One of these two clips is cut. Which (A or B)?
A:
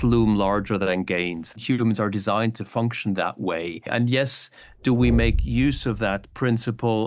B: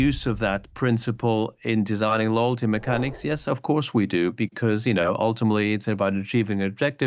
A